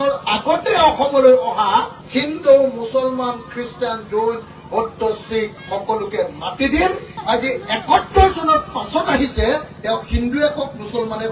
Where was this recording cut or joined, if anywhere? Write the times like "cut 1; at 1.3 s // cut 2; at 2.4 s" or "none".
none